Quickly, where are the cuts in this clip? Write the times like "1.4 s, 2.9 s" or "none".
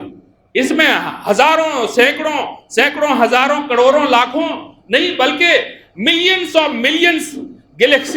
none